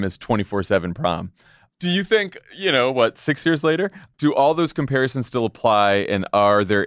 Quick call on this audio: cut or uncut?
cut